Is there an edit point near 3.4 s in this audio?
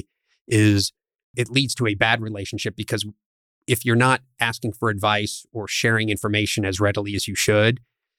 no; 1 cut; at 1.3 s

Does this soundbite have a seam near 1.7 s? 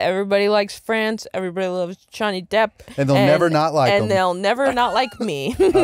no; 0 cuts

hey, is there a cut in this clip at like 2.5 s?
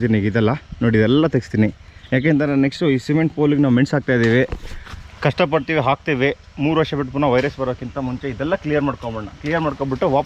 no; 0 cuts

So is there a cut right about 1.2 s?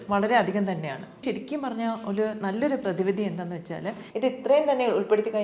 yes; 2 cuts; at 1.2 s, 4.0 s

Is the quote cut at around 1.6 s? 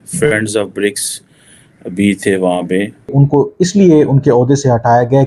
no; 1 cut; at 3.1 s

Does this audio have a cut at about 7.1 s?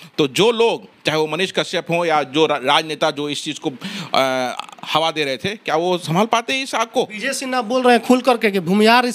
no; 0 cuts

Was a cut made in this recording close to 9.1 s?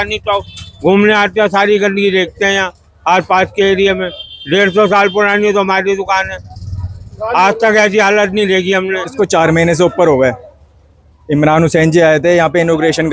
yes; 1 cut; at 9.1 s

